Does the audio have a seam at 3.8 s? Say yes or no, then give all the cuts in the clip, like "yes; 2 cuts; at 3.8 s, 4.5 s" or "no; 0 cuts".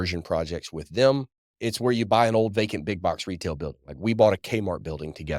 no; 1 cut; at 1.3 s